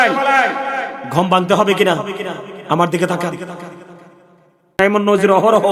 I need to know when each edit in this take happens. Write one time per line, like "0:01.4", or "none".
0:04.8